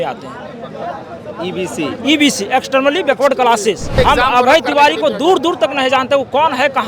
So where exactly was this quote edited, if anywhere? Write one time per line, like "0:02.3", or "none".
0:04.0